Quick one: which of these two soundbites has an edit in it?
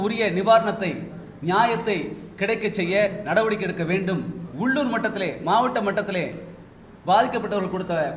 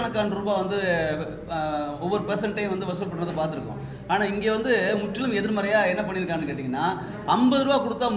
first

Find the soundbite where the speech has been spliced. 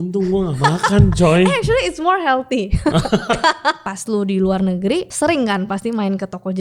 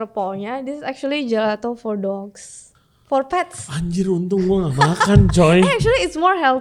first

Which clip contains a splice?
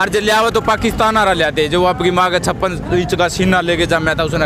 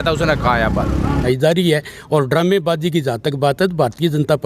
second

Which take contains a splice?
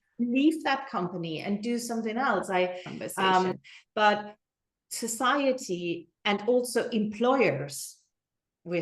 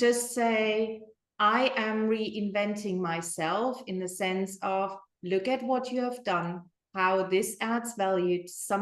first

